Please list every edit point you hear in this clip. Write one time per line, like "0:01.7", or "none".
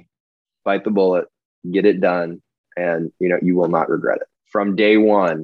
0:04.4